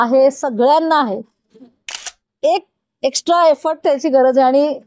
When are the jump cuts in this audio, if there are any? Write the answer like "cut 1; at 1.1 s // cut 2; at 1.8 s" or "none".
none